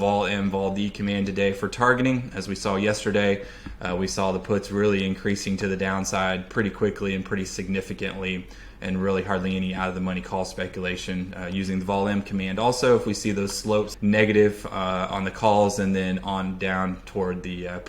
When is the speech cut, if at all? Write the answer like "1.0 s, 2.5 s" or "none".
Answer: 13.9 s